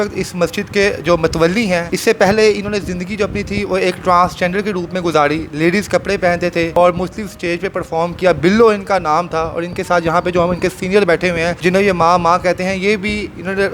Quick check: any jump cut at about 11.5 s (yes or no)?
yes